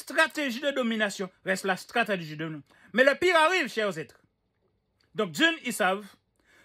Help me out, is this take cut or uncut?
uncut